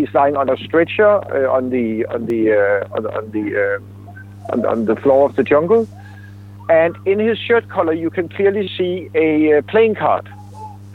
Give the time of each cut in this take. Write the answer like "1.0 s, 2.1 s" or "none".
none